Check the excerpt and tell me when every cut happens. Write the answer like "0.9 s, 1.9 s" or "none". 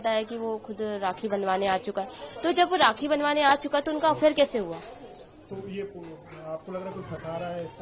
none

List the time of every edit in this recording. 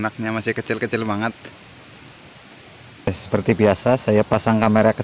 3.1 s

